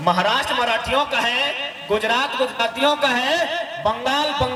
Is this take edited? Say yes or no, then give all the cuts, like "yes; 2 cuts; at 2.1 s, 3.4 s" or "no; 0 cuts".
no; 0 cuts